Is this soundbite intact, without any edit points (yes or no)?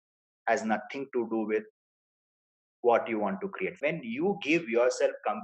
no